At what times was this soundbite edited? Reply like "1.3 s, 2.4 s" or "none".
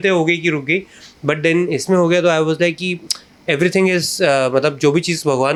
none